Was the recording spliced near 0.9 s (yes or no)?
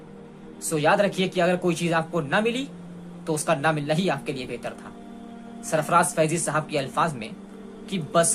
no